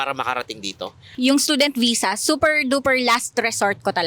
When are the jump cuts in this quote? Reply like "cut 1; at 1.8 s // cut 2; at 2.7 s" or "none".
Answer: cut 1; at 1.1 s